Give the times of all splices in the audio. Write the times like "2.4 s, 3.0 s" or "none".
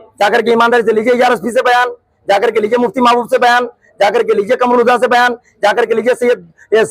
none